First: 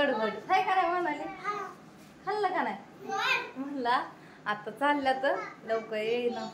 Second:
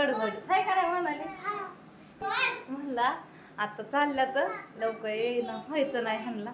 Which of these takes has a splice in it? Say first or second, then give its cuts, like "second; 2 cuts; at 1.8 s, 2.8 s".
second; 1 cut; at 2.0 s